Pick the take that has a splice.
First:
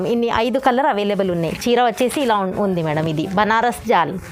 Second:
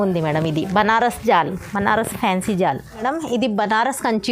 second; 1 cut; at 3.0 s

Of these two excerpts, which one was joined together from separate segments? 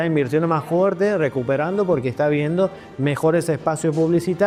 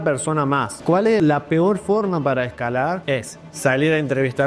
second; 2 cuts; at 1.2 s, 3.0 s

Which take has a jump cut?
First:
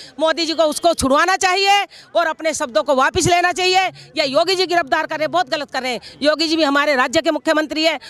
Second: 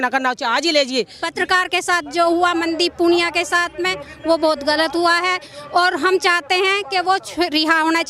second; 1 cut; at 1.2 s

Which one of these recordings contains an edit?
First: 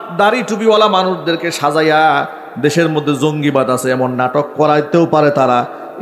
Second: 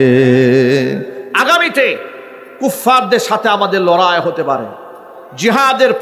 second; 1 cut; at 1.2 s

